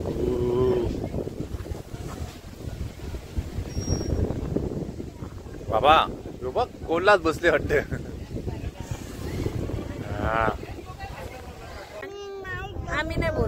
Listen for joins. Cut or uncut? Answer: cut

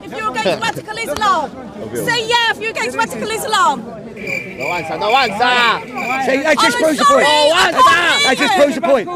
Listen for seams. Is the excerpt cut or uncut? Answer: uncut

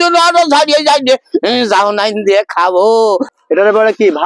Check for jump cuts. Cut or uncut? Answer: cut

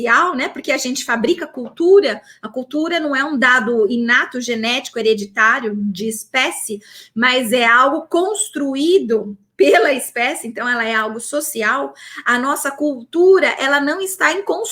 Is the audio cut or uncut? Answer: uncut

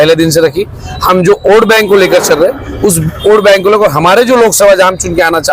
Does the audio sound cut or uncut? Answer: uncut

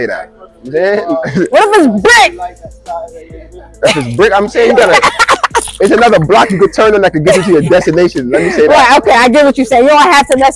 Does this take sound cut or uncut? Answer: uncut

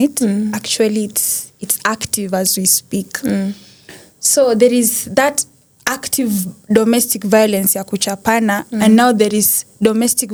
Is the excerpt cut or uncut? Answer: uncut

